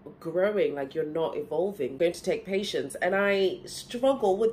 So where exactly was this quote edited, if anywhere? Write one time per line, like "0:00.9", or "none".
0:02.0